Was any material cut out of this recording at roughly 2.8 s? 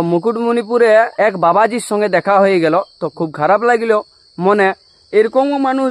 no; 1 cut; at 1.2 s

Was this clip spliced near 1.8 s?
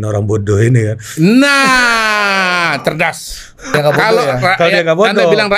no; 1 cut; at 3.7 s

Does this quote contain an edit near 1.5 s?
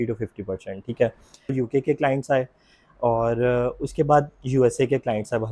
yes; 1 cut; at 1.5 s

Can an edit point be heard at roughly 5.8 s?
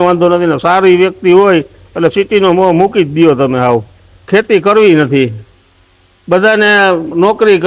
no; 1 cut; at 4.3 s

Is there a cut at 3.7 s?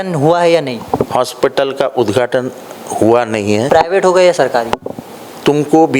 yes; 1 cut; at 3.7 s

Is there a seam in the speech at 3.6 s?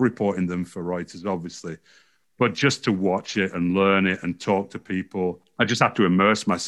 no; 1 cut; at 5.4 s

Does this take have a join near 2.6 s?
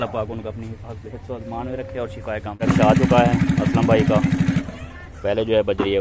yes; 1 cut; at 2.6 s

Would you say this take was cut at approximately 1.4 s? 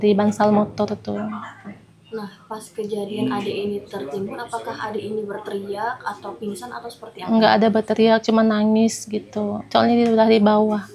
no; 0 cuts

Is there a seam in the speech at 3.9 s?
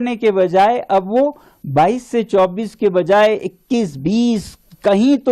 no; 0 cuts

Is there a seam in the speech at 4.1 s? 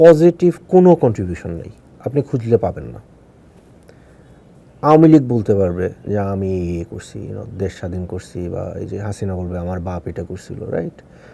yes; 1 cut; at 4.1 s

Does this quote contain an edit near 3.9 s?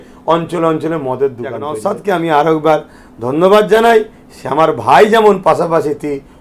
no; 1 cut; at 1.8 s

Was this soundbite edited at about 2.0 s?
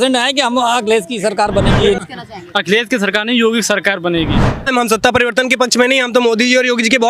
yes; 2 cuts; at 2.0 s, 4.7 s

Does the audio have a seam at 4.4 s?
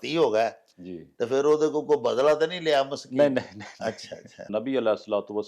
yes; 1 cut; at 4.4 s

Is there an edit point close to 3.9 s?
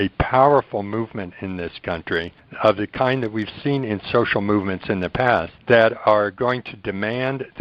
no; 2 cuts; at 2.4 s, 5.5 s

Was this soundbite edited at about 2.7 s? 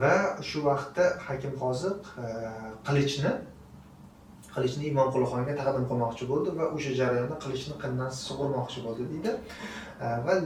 no; 0 cuts

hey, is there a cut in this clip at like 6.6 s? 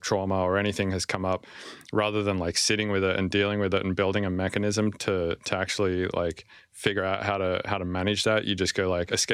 no; 0 cuts

